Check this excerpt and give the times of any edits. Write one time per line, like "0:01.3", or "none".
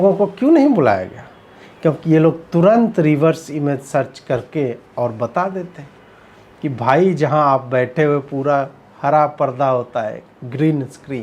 none